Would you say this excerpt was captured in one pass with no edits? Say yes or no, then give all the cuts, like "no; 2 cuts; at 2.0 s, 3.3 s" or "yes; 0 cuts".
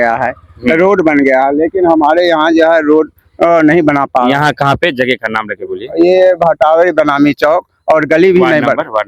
yes; 0 cuts